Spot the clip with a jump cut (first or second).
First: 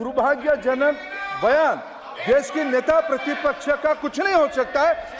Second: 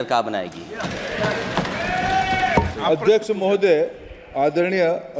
second